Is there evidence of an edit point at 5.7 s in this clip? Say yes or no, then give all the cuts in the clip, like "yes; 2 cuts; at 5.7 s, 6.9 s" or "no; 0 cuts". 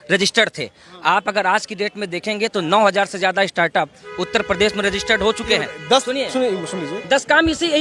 no; 0 cuts